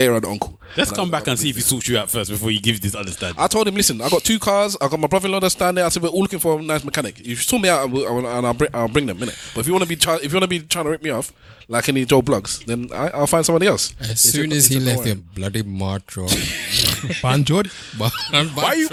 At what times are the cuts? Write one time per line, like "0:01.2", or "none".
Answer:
none